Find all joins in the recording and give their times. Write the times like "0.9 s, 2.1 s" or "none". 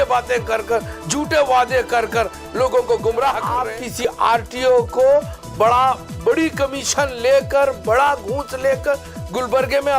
3.8 s